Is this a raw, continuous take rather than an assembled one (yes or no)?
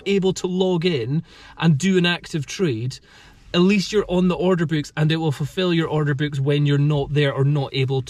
yes